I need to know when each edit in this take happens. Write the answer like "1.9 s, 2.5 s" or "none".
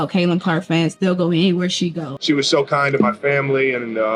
0.9 s, 2.2 s